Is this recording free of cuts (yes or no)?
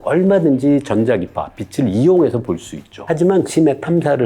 no